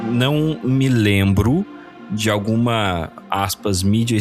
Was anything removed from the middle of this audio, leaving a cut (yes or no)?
no